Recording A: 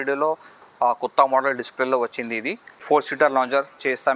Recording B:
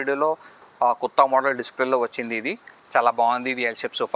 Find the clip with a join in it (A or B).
A